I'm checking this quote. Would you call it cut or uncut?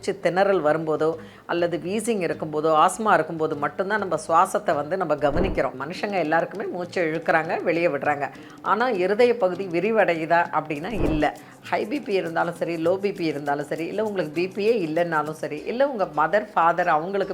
cut